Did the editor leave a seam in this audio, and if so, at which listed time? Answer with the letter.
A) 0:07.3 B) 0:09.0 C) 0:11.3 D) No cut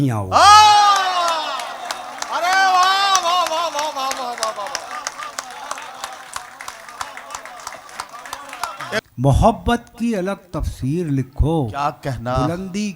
B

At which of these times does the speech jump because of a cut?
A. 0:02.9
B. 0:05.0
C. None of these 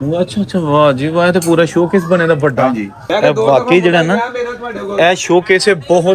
A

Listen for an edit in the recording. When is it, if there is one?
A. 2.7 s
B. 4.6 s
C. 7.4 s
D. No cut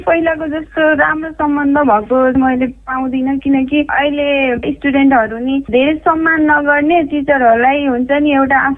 B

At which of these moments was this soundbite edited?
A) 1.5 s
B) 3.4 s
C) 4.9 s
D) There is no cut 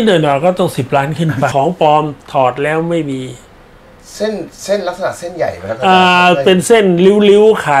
A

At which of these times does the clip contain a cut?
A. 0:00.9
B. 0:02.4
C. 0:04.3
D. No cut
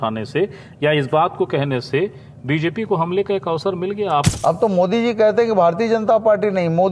C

